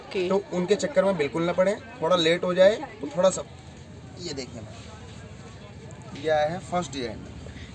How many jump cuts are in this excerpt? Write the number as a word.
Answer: one